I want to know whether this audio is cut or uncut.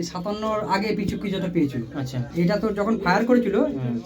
cut